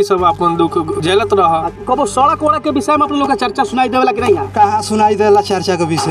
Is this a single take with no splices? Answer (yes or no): no